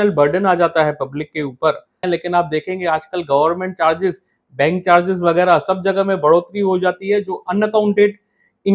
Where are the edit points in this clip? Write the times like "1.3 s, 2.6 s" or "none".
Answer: 2.0 s